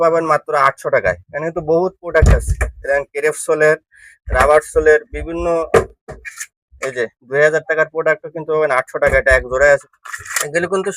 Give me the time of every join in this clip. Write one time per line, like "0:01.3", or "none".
0:09.6